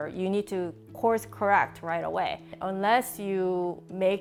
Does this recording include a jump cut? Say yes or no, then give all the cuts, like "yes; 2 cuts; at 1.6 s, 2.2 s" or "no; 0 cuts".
no; 0 cuts